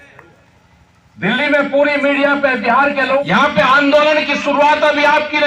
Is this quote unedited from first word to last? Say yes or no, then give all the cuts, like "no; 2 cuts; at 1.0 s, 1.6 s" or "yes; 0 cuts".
no; 1 cut; at 3.2 s